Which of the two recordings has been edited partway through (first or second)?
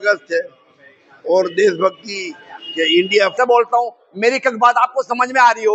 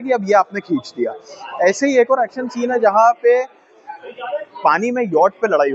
first